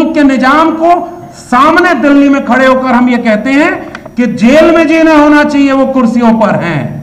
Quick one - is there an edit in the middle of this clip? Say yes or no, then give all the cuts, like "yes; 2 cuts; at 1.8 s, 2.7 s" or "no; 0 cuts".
no; 0 cuts